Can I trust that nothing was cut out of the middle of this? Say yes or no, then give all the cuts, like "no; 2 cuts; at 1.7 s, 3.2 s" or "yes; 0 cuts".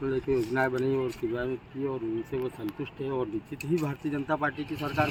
yes; 0 cuts